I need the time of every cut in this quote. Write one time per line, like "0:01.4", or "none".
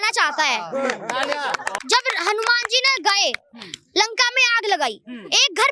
0:01.8